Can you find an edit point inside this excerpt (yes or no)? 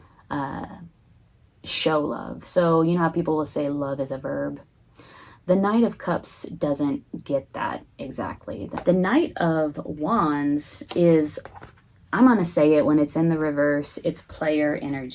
yes